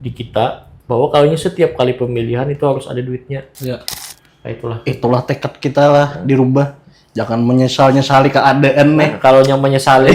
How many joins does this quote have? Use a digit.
1